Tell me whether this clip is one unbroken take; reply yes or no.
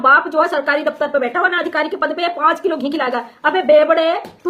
yes